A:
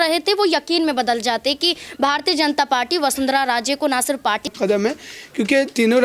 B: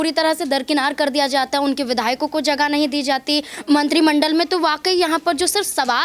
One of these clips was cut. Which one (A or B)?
A